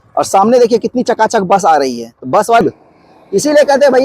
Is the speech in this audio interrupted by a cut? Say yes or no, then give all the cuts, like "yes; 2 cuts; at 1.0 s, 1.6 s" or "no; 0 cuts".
yes; 1 cut; at 2.6 s